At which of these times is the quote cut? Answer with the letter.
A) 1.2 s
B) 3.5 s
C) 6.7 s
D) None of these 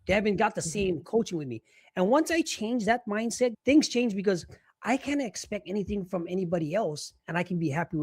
B